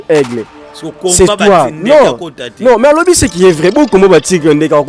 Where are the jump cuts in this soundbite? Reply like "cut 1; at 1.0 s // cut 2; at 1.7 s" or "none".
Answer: none